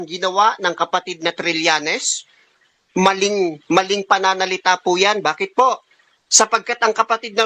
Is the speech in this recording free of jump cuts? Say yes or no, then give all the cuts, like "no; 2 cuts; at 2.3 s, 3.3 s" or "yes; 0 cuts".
yes; 0 cuts